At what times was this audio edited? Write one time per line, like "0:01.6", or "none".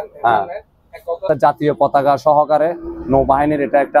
0:01.3